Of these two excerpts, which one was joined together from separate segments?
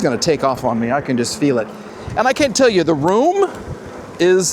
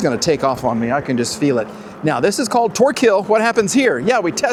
first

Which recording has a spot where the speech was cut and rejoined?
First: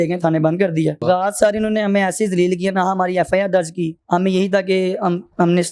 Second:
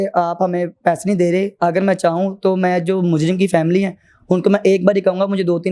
first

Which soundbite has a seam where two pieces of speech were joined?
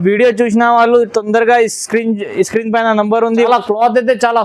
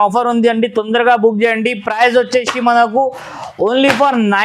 first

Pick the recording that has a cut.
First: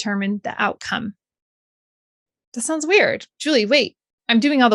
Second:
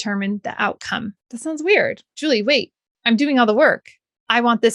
second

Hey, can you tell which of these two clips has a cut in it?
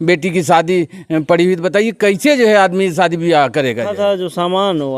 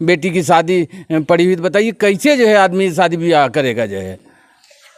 first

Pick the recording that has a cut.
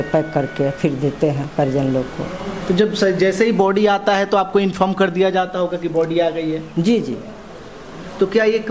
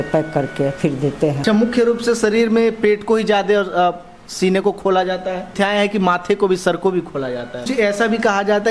second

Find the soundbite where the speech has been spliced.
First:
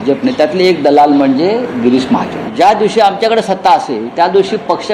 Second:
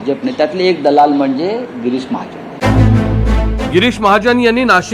first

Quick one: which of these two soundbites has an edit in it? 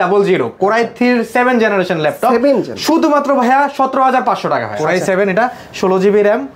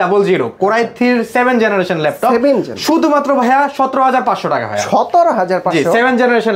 first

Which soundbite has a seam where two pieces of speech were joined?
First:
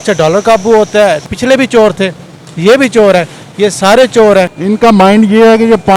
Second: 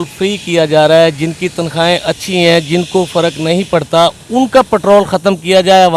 first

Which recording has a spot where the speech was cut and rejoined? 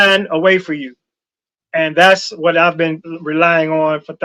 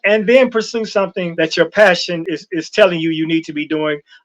second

